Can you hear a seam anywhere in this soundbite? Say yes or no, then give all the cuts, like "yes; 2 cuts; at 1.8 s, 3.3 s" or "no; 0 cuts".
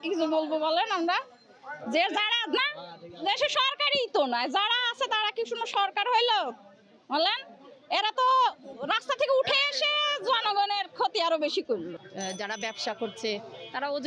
yes; 1 cut; at 12.0 s